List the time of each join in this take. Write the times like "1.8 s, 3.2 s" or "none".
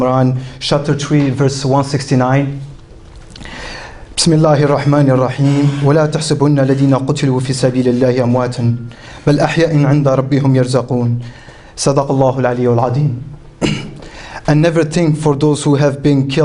8.1 s